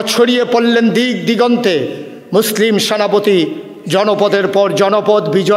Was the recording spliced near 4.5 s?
no; 0 cuts

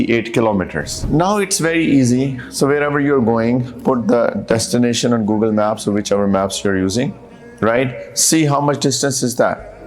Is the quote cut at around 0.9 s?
yes; 1 cut; at 0.9 s

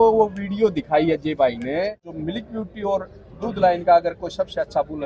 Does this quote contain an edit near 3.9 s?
no; 1 cut; at 2.1 s

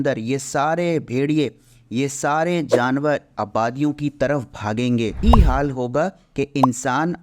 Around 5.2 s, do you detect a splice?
yes; 1 cut; at 5.2 s

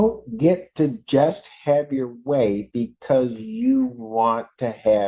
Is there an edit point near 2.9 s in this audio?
no; 0 cuts

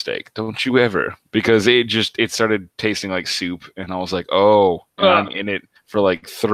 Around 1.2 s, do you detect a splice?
yes; 1 cut; at 1.2 s

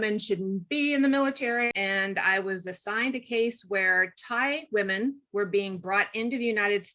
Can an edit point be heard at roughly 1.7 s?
yes; 1 cut; at 1.7 s

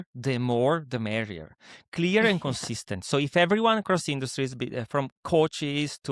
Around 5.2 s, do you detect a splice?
yes; 1 cut; at 5.2 s

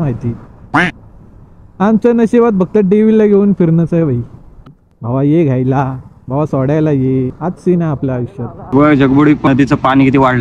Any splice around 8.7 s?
yes; 3 cuts; at 4.6 s, 8.7 s, 9.5 s

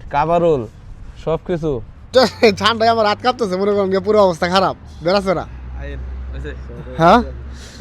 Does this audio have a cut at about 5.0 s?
no; 1 cut; at 2.1 s

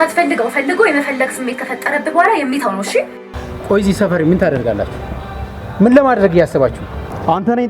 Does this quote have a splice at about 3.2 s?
yes; 1 cut; at 3.2 s

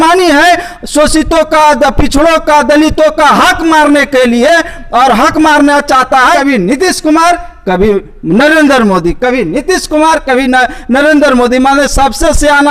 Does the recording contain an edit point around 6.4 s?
yes; 1 cut; at 6.4 s

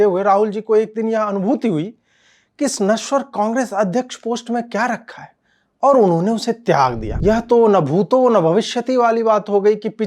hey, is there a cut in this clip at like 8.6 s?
no; 1 cut; at 7.1 s

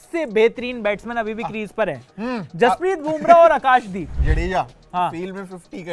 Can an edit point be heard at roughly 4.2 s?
yes; 1 cut; at 4.2 s

